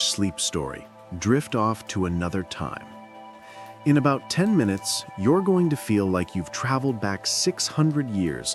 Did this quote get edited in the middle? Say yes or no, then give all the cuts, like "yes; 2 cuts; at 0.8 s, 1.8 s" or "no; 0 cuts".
no; 0 cuts